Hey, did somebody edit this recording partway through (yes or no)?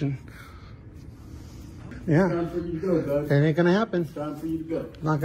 yes